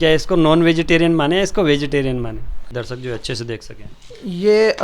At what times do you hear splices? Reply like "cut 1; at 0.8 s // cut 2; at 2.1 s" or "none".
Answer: cut 1; at 2.8 s